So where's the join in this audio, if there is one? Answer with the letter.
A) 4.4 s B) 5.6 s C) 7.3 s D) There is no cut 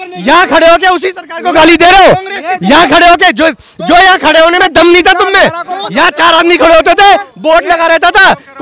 D